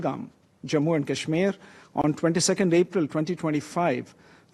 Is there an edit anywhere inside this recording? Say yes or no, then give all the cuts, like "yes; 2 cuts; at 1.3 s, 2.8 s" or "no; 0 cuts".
no; 0 cuts